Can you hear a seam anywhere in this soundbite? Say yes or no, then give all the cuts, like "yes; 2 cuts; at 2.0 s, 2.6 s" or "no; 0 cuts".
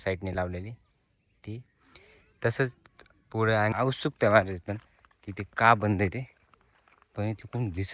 yes; 1 cut; at 3.7 s